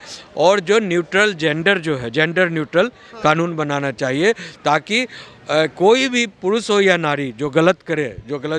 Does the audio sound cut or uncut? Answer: uncut